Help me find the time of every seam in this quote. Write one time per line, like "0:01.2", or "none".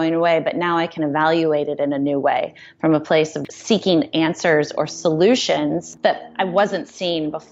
0:03.4
0:05.9

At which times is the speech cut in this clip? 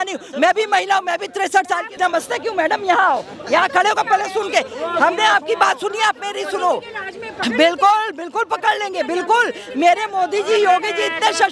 0:01.9

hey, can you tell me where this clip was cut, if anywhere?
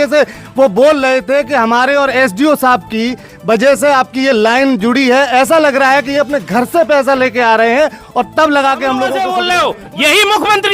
0:09.1

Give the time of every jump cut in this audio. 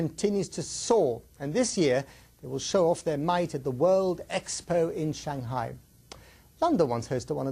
none

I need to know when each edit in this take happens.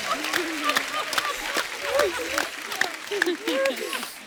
none

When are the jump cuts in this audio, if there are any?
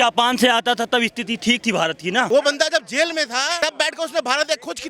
0:02.3
0:03.6

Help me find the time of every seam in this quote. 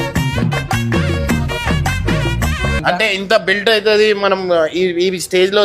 0:02.8

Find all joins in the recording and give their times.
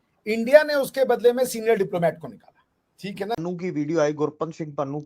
0:03.4

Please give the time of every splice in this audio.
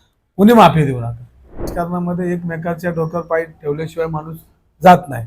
0:01.7

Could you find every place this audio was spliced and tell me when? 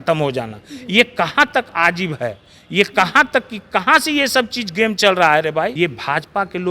0:05.7

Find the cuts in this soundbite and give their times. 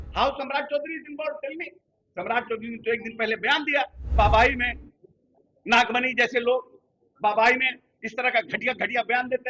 0:04.1

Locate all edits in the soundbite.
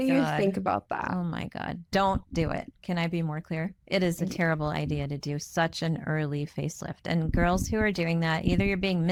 none

